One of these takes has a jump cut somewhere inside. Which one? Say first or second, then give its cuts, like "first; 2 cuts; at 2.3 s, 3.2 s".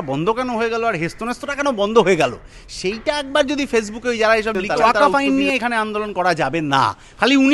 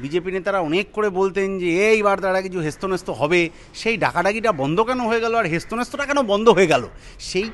first; 1 cut; at 4.8 s